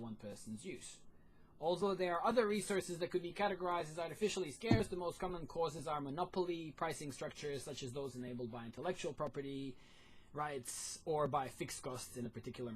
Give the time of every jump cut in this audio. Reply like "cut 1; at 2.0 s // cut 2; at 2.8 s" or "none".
cut 1; at 9.2 s